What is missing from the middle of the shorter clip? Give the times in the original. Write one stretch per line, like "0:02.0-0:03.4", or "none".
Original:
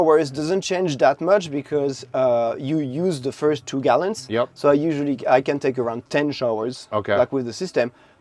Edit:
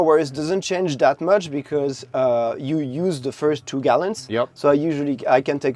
none